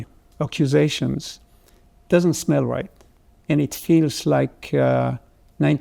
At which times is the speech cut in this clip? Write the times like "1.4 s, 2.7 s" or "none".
none